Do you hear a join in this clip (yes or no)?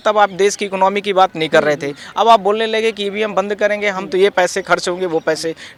no